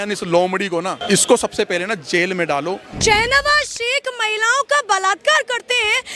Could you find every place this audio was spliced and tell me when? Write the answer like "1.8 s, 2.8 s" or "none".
1.0 s, 2.9 s